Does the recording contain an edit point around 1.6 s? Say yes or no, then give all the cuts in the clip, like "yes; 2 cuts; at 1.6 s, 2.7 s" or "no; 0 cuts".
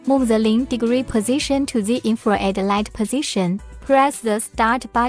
no; 1 cut; at 3.7 s